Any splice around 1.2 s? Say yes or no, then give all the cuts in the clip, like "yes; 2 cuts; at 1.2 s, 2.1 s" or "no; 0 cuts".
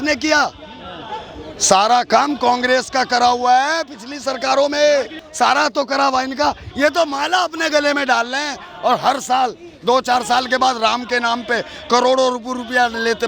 no; 1 cut; at 5.2 s